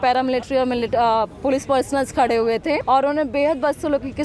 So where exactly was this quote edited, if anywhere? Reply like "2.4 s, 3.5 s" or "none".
2.8 s